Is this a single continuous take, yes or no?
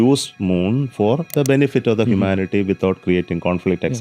no